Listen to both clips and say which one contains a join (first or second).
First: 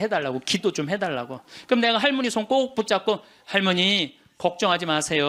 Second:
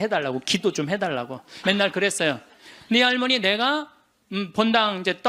second